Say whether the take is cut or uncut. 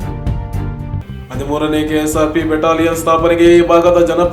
uncut